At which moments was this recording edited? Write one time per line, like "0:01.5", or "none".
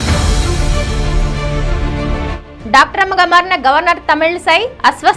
0:02.3